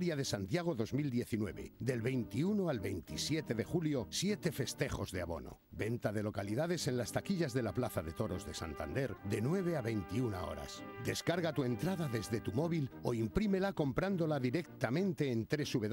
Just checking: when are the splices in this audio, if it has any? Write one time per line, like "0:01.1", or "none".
none